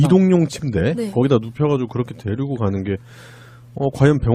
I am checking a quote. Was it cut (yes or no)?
yes